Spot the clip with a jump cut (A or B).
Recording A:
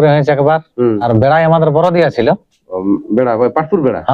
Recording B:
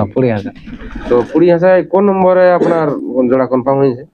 A